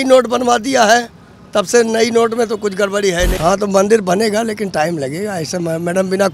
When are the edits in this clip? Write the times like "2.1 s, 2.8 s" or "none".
3.3 s